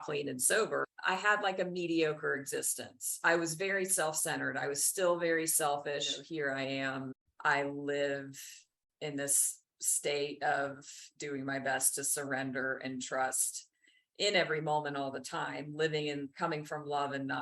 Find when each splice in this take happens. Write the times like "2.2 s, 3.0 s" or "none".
0.9 s, 6.2 s, 7.2 s